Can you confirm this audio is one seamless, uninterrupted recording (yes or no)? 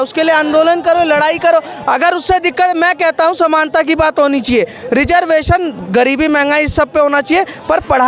yes